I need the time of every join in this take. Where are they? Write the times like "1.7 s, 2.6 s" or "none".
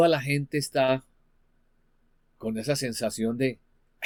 none